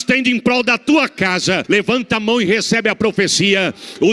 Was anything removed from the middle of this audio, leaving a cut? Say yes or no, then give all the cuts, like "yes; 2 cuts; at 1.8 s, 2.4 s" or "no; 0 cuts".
yes; 1 cut; at 1.6 s